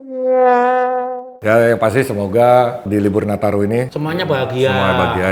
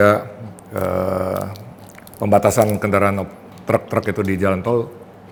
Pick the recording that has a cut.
first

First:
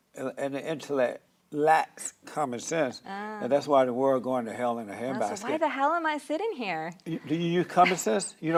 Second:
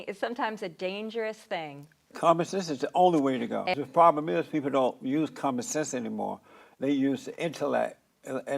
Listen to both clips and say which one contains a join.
second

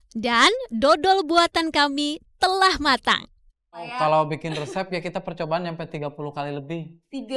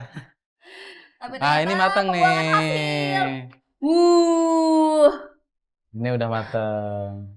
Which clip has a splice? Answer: first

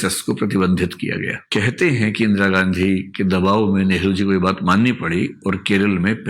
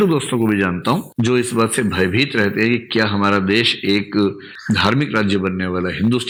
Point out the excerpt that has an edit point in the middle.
first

